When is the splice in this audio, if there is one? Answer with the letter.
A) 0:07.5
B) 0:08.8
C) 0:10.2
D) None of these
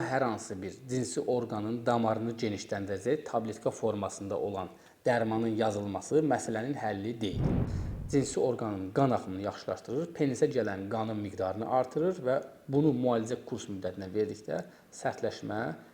A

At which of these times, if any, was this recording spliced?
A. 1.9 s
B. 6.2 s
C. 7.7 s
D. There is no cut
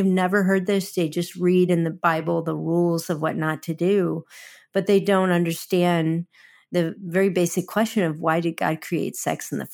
A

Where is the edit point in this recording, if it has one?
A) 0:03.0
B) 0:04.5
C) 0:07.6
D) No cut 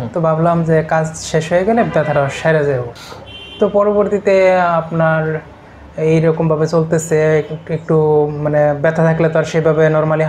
A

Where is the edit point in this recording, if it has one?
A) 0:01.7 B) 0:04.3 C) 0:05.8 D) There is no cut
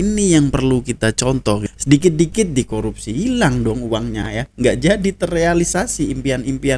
A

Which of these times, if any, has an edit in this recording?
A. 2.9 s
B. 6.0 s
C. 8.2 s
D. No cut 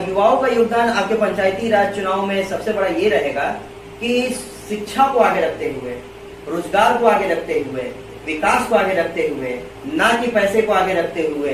D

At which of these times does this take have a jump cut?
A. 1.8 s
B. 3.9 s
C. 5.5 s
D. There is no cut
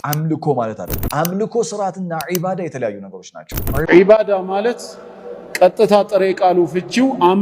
B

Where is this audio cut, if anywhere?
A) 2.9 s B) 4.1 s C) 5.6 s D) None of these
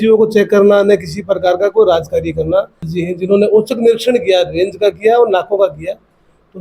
A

